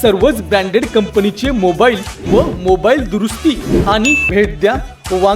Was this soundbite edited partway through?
yes; 1 cut; at 4.3 s

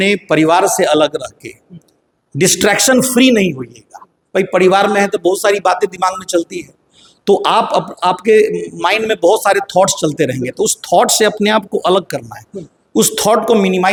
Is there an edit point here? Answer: no; 0 cuts

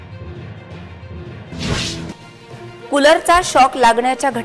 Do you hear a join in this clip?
yes; 1 cut; at 1.0 s

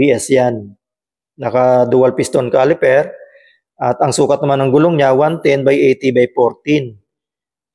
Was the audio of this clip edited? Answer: no; 0 cuts

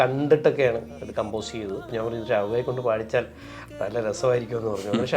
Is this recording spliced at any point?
yes; 1 cut; at 1.9 s

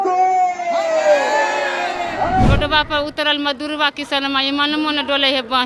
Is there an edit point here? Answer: yes; 1 cut; at 2.5 s

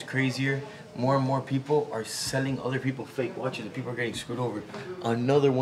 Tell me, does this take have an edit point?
no; 0 cuts

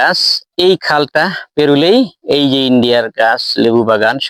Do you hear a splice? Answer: no; 0 cuts

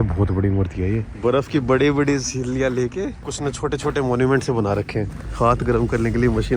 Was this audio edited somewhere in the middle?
yes; 3 cuts; at 1.1 s, 3.2 s, 5.2 s

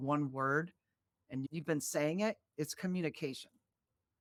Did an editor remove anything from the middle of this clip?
no; 0 cuts

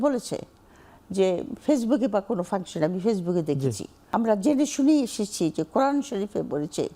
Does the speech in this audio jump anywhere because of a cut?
yes; 1 cut; at 3.9 s

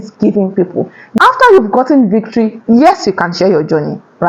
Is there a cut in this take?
yes; 1 cut; at 1.2 s

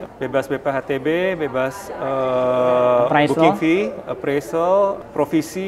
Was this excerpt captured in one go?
yes; 0 cuts

